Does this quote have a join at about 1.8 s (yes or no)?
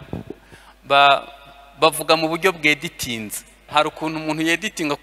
no